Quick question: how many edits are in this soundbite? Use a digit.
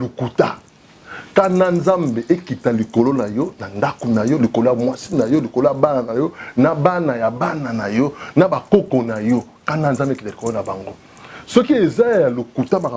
0